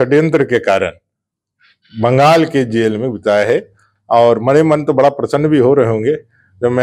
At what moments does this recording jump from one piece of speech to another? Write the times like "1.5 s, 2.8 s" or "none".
none